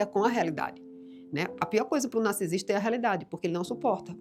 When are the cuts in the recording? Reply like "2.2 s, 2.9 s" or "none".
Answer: none